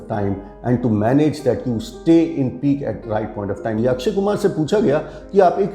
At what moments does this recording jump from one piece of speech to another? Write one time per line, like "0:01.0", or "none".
0:03.8